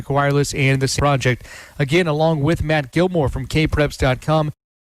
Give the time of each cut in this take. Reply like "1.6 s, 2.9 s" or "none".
0.9 s